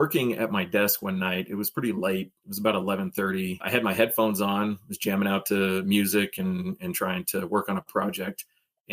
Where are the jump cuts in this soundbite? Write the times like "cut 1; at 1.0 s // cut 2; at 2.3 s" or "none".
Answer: cut 1; at 3.6 s